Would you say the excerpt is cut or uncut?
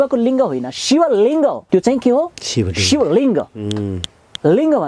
cut